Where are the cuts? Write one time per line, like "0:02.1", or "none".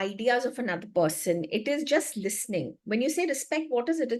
none